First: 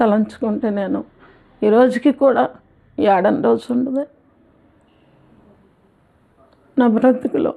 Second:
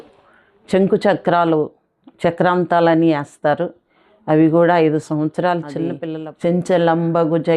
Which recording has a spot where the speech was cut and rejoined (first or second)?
second